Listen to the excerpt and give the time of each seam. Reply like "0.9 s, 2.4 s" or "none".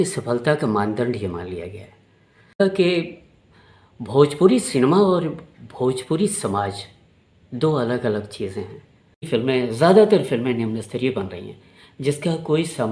2.6 s, 9.2 s